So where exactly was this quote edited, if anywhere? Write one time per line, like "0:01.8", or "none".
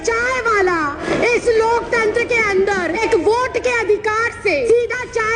0:01.0
0:03.0
0:04.7